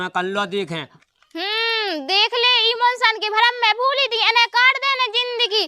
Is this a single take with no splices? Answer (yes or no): no